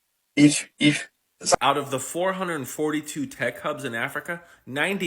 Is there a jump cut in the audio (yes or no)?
yes